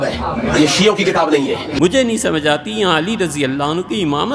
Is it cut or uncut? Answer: cut